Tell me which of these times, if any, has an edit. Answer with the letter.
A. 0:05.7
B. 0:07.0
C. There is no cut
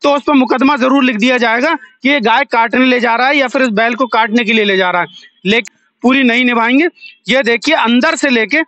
A